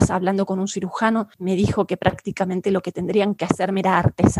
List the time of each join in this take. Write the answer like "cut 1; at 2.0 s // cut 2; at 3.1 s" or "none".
cut 1; at 1.3 s